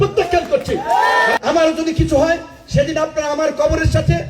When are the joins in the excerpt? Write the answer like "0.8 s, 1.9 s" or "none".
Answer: 1.4 s